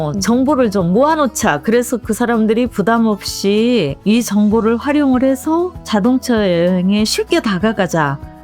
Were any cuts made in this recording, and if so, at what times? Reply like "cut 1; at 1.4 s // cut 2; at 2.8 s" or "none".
cut 1; at 3.9 s // cut 2; at 5.8 s